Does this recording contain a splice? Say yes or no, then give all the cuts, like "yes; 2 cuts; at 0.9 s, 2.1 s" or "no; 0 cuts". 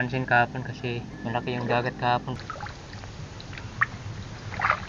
yes; 2 cuts; at 1.1 s, 2.4 s